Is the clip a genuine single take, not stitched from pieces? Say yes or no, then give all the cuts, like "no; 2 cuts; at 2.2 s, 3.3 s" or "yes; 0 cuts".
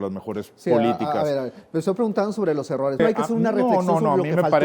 no; 1 cut; at 3.0 s